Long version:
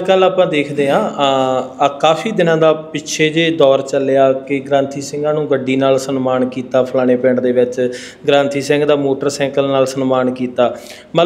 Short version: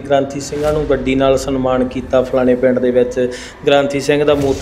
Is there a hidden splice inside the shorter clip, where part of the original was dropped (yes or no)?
no